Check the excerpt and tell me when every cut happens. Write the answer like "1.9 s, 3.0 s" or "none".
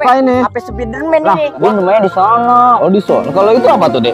1.6 s